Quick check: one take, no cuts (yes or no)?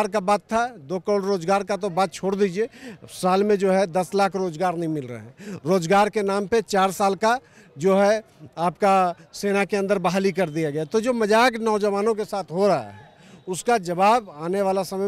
yes